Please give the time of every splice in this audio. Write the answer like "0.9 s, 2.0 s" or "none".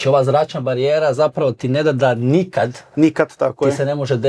none